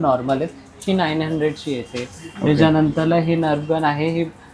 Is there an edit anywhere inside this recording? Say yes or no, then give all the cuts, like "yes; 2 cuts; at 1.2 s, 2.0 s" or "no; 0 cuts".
no; 0 cuts